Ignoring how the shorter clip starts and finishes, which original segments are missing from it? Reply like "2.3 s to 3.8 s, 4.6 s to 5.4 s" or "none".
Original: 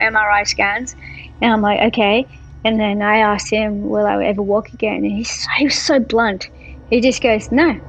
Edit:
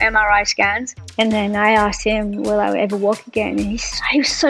1.0 s to 2.4 s

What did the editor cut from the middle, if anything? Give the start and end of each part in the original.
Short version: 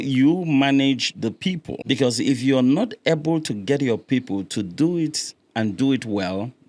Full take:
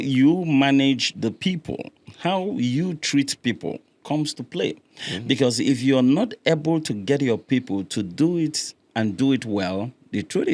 1.7 s to 5.1 s

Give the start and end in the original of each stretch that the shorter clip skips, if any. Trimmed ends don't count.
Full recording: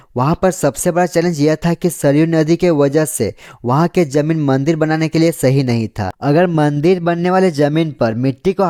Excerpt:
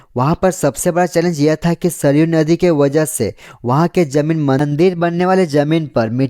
4.6 s to 6.7 s

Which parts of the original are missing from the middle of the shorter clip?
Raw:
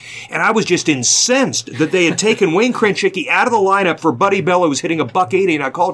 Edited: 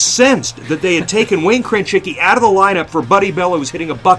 none

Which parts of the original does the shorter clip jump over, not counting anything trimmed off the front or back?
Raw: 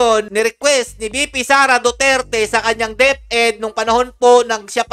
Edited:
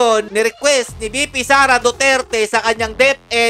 none

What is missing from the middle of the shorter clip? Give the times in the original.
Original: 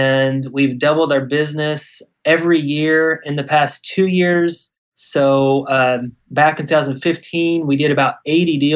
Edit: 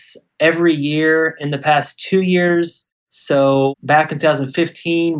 5.6 s to 6.2 s

